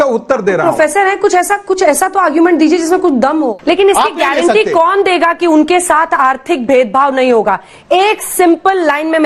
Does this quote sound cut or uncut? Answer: cut